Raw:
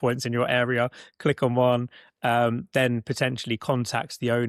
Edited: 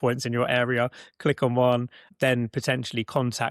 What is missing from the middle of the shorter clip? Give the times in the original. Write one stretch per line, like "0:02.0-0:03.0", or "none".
0:02.1-0:02.6